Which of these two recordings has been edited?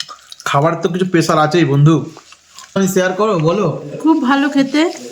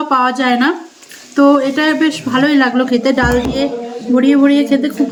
first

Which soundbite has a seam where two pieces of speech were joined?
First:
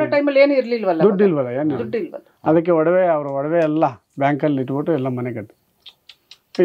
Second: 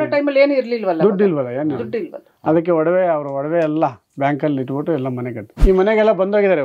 second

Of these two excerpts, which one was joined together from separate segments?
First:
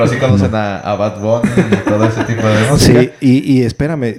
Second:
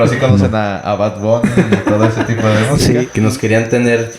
second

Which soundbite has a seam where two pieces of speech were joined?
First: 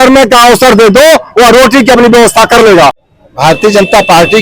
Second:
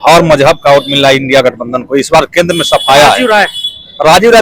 first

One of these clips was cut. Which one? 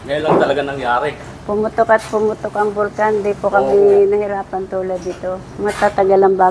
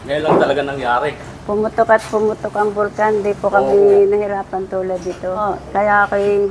second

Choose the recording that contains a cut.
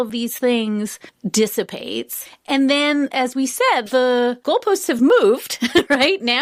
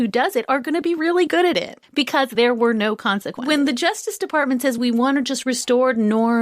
second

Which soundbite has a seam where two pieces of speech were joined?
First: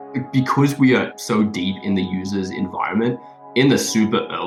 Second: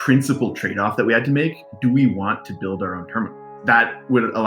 second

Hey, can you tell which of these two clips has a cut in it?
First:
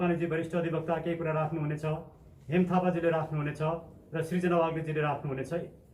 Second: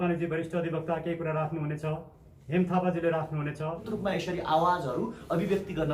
second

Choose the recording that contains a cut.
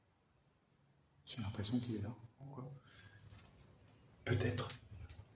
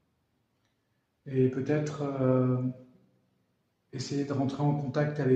first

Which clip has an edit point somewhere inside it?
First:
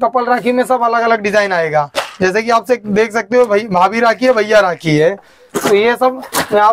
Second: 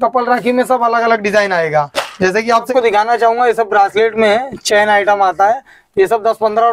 second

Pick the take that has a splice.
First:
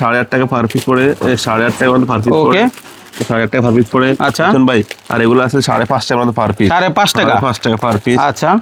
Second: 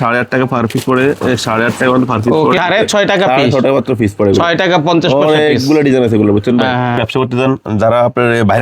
second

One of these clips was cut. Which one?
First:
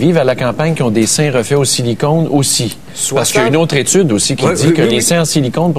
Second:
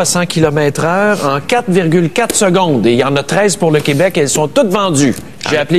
first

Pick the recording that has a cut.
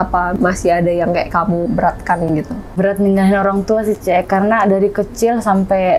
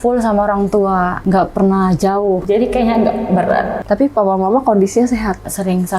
second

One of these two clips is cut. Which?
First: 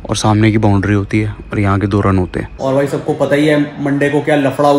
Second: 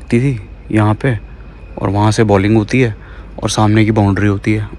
first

